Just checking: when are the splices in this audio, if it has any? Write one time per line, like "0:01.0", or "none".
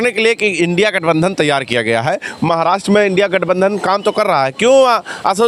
none